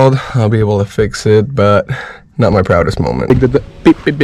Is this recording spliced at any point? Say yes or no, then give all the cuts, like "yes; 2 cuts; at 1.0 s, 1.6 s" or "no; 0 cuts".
yes; 1 cut; at 3.3 s